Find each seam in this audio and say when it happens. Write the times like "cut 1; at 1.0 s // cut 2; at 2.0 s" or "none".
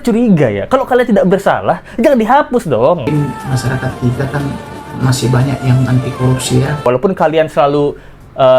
cut 1; at 3.0 s // cut 2; at 6.9 s